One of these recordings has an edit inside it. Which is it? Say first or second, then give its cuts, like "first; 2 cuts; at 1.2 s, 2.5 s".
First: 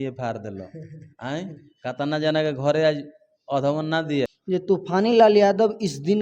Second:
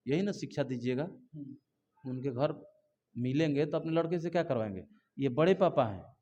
first; 1 cut; at 4.4 s